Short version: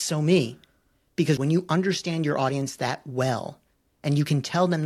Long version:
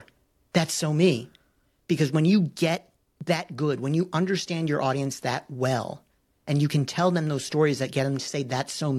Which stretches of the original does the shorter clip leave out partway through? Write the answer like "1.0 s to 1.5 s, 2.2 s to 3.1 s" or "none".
2.1 s to 3.8 s